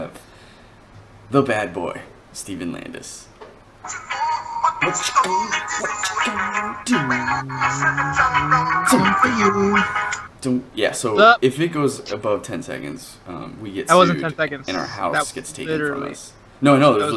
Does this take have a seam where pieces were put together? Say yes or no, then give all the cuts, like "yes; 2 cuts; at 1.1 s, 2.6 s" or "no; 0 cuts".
no; 0 cuts